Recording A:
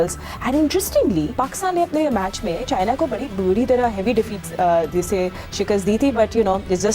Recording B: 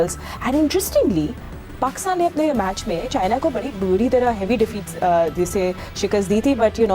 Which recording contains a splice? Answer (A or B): A